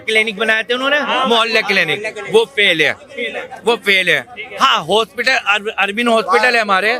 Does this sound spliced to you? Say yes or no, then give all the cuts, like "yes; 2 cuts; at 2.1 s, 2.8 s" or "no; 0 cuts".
no; 0 cuts